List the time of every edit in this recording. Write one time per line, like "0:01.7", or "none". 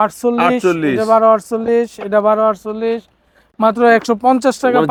none